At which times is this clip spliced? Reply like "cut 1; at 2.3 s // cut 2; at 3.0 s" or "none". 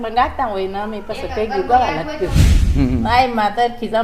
cut 1; at 2.4 s